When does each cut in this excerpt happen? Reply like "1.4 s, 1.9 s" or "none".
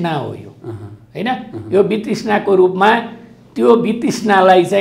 none